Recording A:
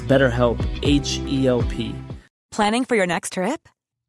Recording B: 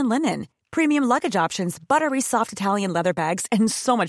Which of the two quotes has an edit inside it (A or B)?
A